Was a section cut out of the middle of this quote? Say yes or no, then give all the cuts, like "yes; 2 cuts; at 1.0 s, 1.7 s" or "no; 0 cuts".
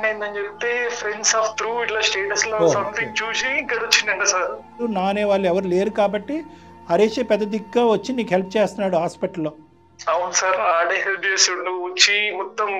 yes; 1 cut; at 4.8 s